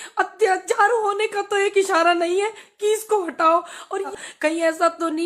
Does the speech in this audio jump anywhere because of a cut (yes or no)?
yes